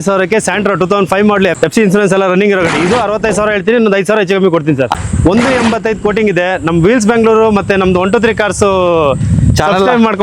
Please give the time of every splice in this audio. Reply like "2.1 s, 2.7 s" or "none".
1.5 s, 4.9 s